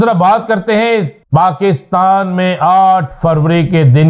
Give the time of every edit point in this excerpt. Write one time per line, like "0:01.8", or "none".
0:01.2